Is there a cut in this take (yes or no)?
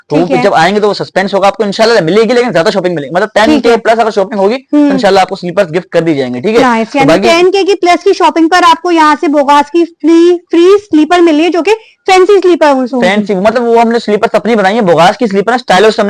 no